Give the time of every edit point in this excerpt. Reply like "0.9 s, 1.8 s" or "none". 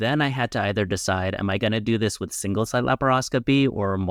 none